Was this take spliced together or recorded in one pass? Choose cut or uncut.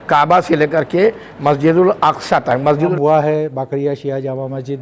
cut